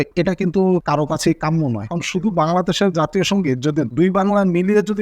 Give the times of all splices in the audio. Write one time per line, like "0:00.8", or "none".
0:01.8